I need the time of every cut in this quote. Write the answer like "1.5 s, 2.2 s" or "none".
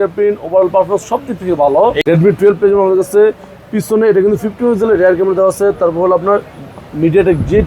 2.0 s